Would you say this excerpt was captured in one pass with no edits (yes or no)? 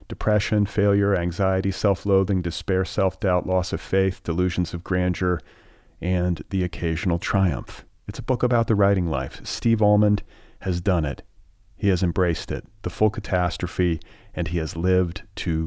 yes